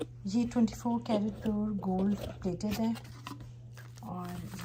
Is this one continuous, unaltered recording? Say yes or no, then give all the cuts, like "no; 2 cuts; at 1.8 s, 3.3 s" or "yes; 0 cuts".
yes; 0 cuts